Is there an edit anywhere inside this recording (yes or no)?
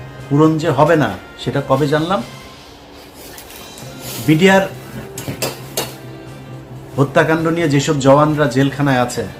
no